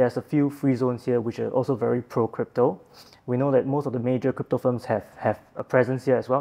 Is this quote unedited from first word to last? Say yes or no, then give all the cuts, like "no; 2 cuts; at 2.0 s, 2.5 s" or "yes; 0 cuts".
yes; 0 cuts